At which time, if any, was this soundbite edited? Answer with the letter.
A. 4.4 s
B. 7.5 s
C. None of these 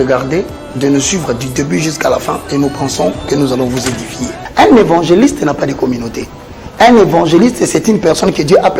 A